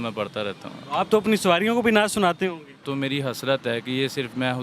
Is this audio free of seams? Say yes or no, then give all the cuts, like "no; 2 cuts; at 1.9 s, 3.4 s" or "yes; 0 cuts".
no; 1 cut; at 2.8 s